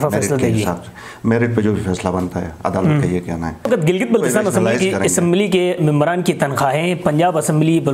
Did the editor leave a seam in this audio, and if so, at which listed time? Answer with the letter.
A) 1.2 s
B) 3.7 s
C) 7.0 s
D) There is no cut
B